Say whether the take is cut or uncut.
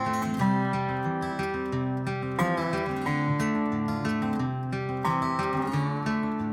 uncut